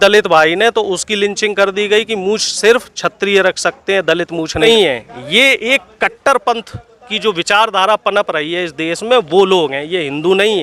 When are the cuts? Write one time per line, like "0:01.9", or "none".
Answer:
0:04.6